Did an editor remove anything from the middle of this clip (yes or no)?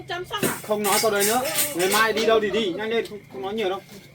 no